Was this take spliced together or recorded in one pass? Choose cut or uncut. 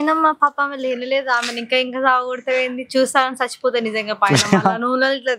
uncut